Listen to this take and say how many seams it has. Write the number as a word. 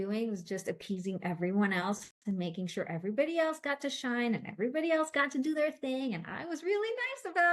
zero